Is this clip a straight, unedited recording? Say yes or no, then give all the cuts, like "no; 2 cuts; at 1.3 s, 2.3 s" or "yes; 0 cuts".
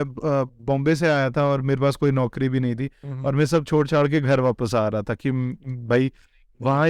yes; 0 cuts